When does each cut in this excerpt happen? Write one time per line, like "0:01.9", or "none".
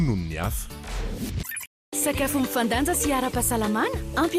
0:01.9